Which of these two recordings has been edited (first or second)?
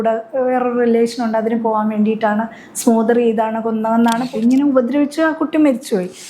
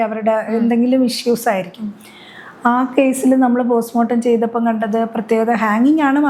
first